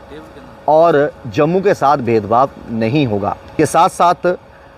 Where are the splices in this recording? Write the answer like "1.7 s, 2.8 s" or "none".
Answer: 3.5 s